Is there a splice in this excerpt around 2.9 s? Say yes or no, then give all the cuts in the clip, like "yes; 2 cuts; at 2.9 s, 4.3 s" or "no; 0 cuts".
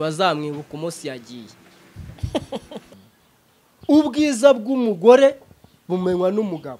yes; 1 cut; at 2.9 s